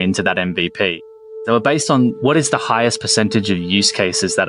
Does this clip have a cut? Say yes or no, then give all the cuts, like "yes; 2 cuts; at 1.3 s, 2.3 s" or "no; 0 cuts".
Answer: yes; 1 cut; at 1.3 s